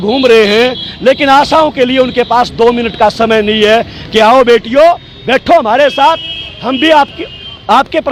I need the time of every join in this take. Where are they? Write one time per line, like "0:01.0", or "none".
none

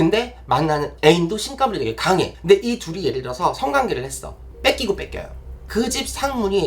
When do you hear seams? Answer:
0:05.5

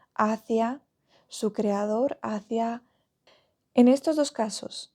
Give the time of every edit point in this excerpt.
0:02.9

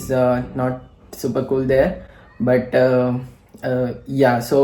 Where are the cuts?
none

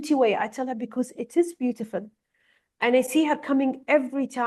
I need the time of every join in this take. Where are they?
none

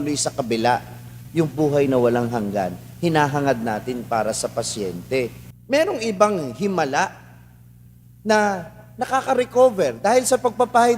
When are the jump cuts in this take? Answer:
0:05.5

